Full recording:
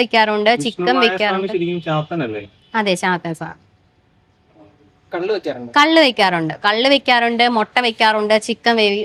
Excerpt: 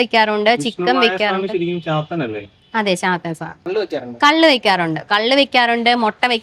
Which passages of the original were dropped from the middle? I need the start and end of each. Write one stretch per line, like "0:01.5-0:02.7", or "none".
0:03.7-0:05.2